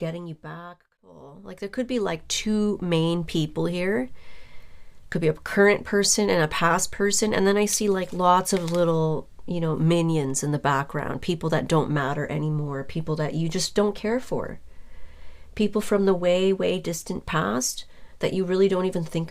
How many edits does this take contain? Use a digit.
1